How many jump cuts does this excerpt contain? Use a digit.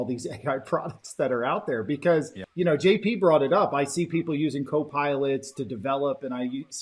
1